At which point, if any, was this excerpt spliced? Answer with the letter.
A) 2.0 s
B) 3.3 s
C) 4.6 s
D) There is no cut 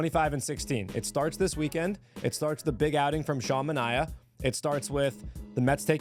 D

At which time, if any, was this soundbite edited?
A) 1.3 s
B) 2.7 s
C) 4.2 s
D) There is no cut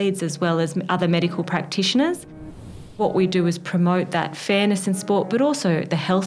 B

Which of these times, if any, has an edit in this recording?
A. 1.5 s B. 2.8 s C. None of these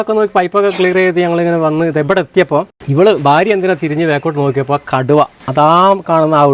B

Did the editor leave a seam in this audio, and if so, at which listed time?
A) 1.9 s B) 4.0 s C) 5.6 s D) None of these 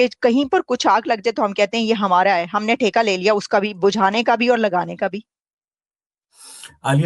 D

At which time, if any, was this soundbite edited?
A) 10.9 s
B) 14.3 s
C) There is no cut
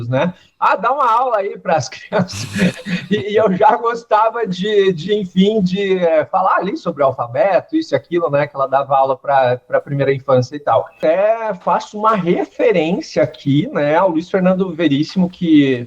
A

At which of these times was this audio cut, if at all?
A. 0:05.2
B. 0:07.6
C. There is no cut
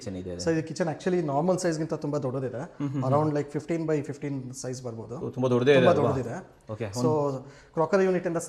C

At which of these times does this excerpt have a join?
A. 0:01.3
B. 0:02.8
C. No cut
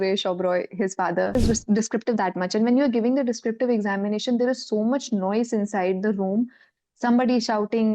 A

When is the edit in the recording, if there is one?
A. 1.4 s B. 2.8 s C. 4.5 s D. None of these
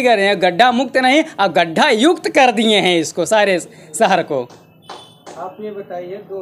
D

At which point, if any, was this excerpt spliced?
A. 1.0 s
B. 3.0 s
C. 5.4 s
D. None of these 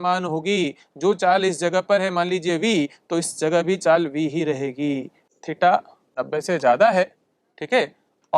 C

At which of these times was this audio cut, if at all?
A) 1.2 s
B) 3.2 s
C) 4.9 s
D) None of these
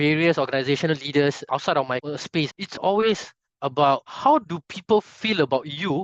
D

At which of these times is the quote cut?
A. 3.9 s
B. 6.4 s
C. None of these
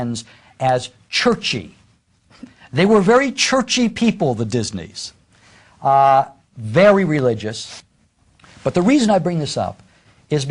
A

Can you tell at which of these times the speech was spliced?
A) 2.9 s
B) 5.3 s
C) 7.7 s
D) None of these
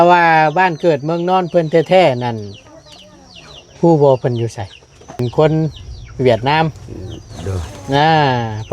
B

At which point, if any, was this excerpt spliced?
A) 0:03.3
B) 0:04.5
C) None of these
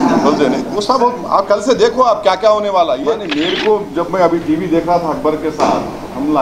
A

